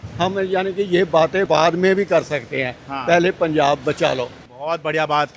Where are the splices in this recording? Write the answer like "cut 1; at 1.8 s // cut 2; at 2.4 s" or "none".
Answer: cut 1; at 1.5 s // cut 2; at 4.5 s